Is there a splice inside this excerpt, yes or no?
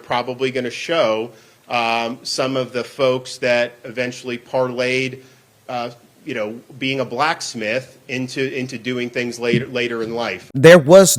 no